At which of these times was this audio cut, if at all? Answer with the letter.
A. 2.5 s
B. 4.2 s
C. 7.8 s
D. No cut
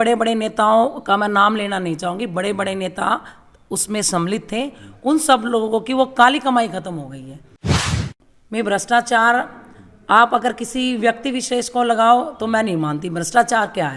C